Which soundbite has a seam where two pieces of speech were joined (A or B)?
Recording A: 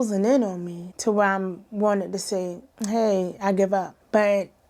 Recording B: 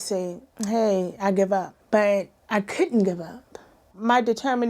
B